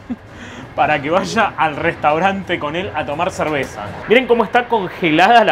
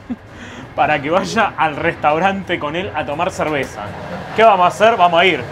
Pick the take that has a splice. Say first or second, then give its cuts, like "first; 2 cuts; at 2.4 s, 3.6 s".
first; 1 cut; at 3.9 s